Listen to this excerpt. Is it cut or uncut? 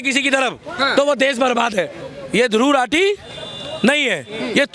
cut